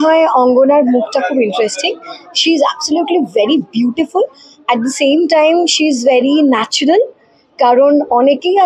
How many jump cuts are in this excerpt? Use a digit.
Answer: 0